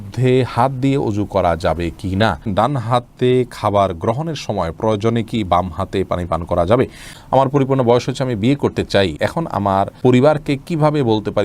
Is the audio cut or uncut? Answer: cut